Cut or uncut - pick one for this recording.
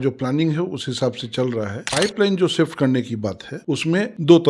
uncut